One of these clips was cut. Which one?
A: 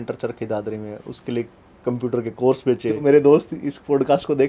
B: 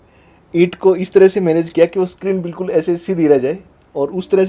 A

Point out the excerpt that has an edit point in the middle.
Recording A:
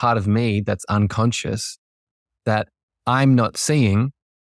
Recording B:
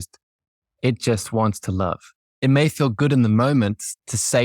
B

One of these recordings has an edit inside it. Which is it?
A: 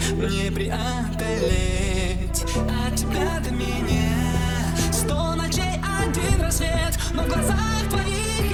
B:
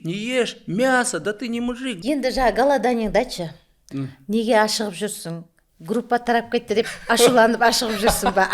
B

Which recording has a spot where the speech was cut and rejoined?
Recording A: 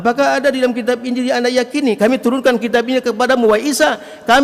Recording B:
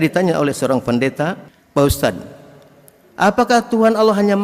B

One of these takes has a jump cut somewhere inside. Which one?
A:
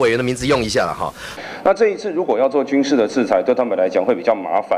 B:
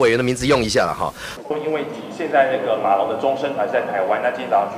A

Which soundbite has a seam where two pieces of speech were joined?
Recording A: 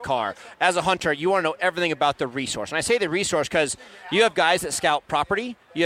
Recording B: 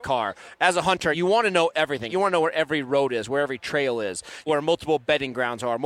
B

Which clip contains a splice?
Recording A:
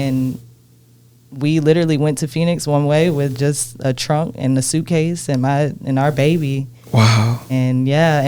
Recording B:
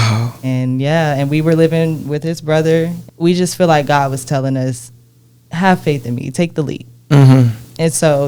B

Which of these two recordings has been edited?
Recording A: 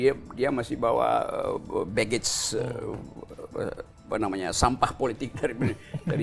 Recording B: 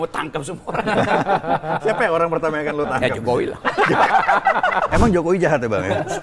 B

